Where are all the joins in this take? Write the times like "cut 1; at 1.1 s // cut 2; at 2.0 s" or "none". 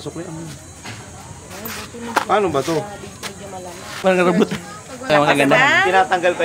cut 1; at 3.9 s // cut 2; at 5.1 s